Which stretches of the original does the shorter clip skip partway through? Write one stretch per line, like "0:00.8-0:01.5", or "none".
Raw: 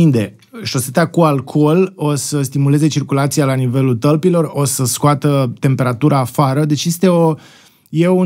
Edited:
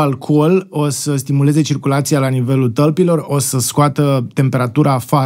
none